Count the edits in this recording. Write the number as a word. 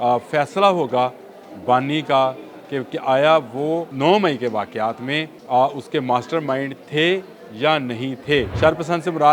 three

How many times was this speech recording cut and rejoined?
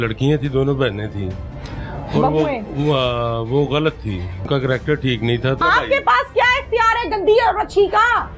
two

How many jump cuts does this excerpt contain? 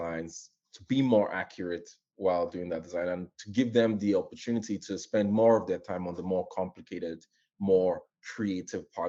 zero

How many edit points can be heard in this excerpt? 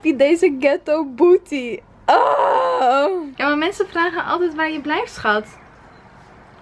one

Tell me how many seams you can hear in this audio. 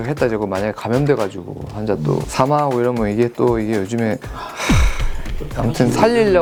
zero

